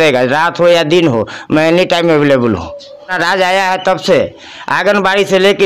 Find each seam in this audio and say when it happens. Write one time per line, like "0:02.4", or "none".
0:03.1

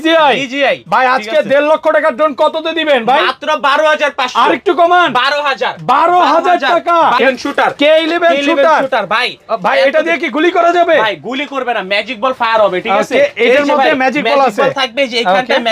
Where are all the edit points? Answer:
0:07.2

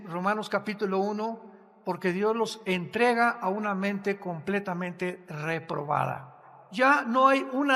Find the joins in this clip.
0:06.6

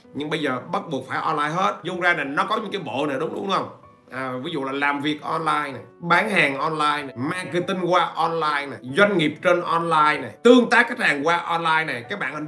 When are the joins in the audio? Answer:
0:01.8
0:05.9
0:07.1
0:08.7
0:10.3

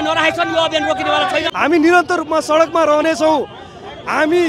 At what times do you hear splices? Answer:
0:01.5

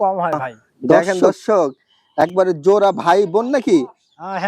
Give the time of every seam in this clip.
0:00.9

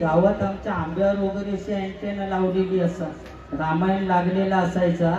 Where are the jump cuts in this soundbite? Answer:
none

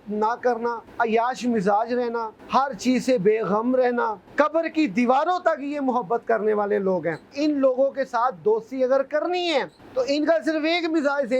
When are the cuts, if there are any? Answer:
0:00.8
0:02.4
0:04.2
0:07.3
0:09.8

